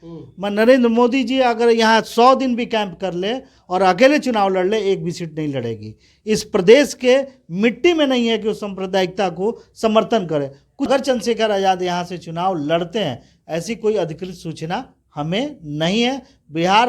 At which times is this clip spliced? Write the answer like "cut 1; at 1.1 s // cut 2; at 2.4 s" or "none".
cut 1; at 10.9 s